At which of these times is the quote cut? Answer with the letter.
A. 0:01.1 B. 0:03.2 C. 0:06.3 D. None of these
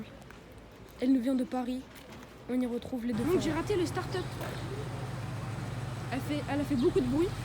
B